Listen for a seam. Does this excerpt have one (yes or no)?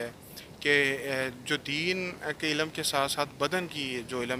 no